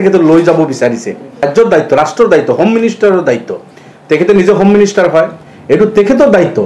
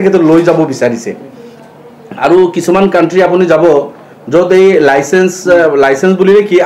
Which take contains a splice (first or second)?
first